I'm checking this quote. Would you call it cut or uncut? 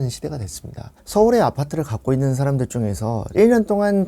cut